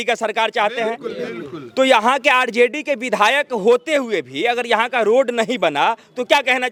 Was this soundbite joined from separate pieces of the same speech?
no; 0 cuts

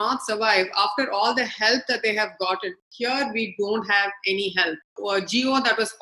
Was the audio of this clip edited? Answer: yes; 2 cuts; at 2.9 s, 5.0 s

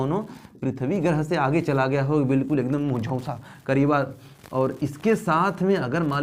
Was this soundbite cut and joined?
no; 0 cuts

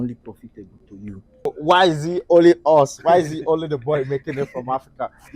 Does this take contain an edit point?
yes; 1 cut; at 1.5 s

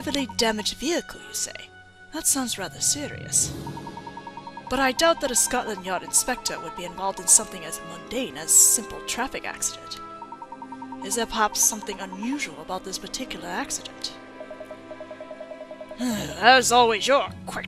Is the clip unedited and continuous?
no; 1 cut; at 16.4 s

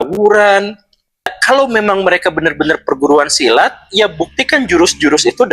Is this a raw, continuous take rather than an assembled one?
no; 1 cut; at 1.4 s

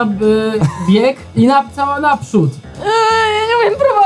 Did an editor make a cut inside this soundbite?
yes; 1 cut; at 1.2 s

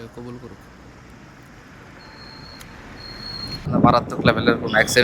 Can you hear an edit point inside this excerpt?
yes; 1 cut; at 3.6 s

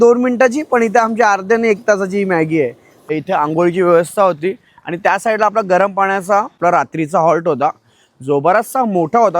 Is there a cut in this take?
yes; 2 cuts; at 3.1 s, 6.6 s

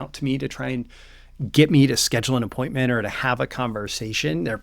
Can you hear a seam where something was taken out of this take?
no; 0 cuts

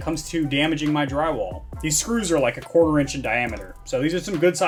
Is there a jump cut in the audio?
no; 0 cuts

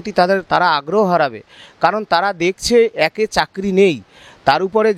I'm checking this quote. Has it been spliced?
no; 0 cuts

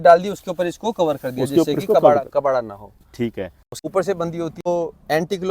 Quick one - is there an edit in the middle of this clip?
yes; 2 cuts; at 3.6 s, 4.7 s

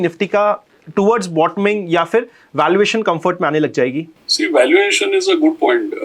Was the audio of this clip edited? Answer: no; 0 cuts

